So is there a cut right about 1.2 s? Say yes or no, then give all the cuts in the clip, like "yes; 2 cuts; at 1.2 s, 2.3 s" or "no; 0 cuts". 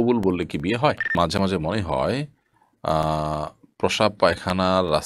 yes; 1 cut; at 1.2 s